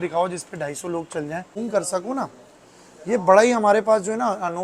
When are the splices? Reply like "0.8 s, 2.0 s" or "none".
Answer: 1.5 s

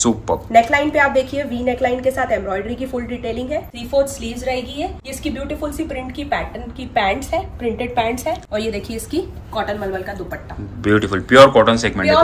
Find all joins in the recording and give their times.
3.8 s, 5.1 s, 8.4 s

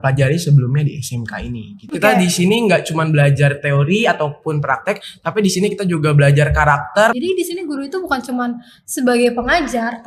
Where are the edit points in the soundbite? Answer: 1.8 s, 7.1 s

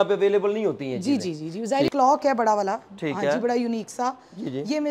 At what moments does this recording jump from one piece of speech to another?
1.9 s

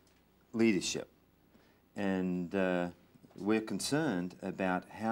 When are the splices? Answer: none

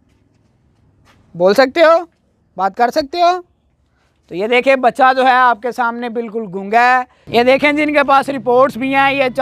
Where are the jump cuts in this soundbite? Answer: 7.2 s

